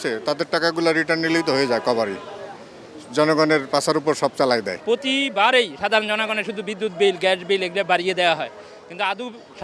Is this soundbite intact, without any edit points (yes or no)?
yes